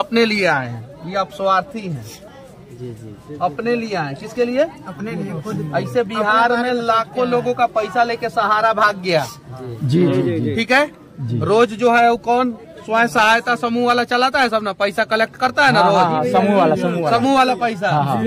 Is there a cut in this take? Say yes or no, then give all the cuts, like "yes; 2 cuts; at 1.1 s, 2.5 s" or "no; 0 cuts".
no; 0 cuts